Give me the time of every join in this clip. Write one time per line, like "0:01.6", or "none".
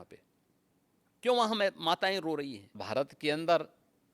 0:02.8